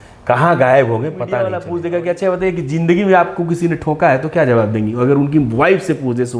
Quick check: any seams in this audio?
yes; 1 cut; at 1.5 s

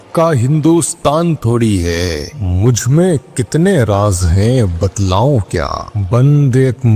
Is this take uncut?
yes; 0 cuts

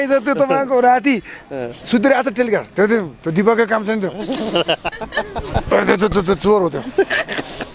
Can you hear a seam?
no; 0 cuts

